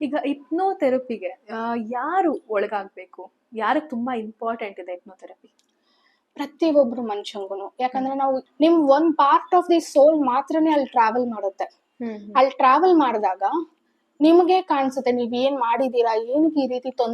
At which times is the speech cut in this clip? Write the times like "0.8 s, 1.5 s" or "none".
8.5 s